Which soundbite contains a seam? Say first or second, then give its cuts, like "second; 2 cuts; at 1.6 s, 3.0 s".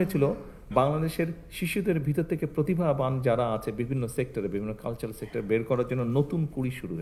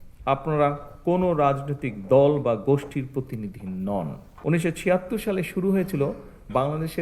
second; 1 cut; at 4.2 s